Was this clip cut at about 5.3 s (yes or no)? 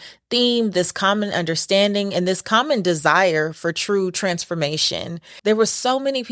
yes